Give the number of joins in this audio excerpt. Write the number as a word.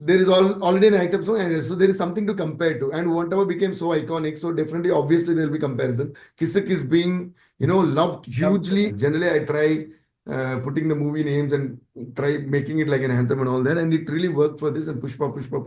two